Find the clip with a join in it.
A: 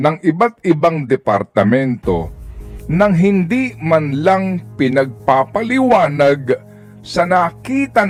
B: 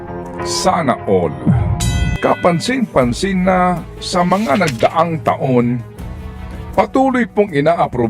B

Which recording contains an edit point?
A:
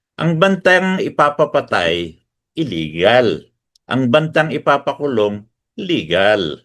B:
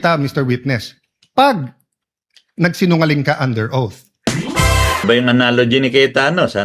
B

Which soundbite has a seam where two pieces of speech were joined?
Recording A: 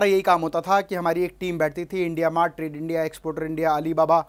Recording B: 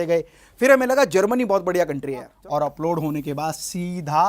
B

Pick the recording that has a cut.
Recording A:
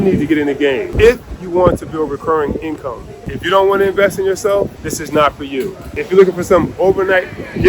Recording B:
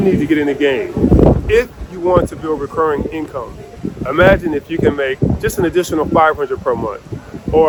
A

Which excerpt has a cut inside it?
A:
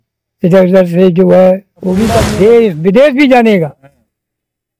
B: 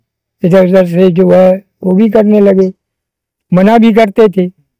A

